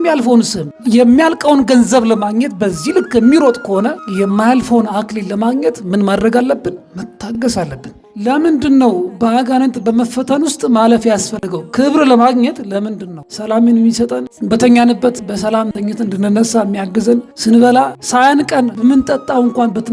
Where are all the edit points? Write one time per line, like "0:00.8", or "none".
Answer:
0:08.1
0:13.3